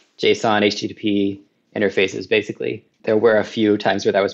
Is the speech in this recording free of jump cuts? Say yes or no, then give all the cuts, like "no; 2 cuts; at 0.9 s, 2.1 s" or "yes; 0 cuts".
no; 1 cut; at 2.9 s